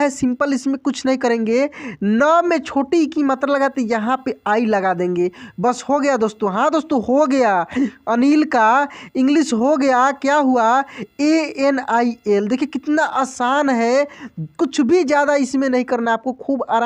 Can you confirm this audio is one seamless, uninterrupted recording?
yes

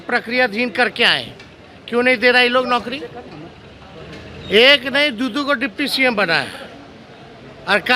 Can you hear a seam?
no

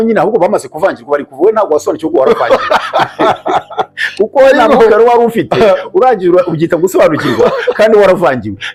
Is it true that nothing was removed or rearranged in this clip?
yes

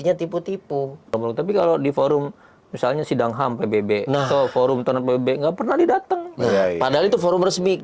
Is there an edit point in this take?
yes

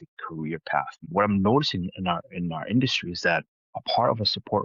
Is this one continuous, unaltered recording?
no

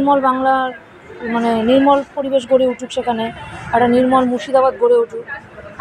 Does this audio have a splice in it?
no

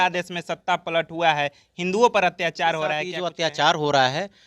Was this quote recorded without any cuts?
no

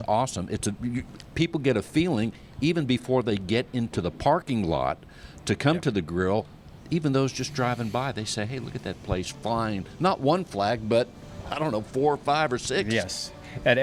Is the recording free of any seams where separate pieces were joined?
yes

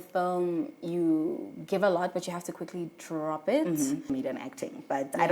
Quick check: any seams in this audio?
yes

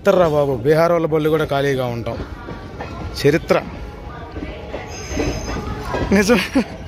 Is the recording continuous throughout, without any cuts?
yes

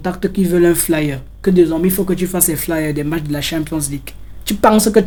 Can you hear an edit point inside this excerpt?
no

